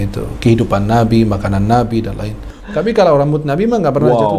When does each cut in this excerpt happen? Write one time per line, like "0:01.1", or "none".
0:02.6